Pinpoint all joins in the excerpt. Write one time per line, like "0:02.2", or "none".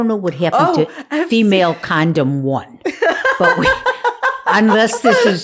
none